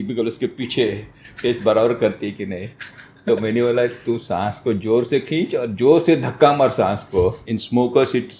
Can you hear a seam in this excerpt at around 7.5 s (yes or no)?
yes